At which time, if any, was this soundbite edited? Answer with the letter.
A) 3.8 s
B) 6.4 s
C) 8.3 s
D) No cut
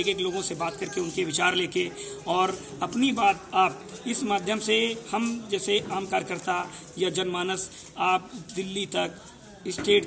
D